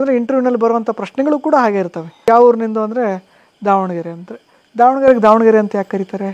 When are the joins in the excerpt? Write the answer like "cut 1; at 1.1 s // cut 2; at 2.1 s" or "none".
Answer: cut 1; at 2.2 s